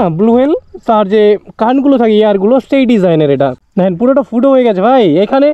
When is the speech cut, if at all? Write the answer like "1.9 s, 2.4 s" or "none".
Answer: 3.6 s